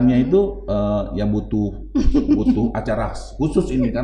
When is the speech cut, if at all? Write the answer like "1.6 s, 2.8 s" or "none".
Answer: none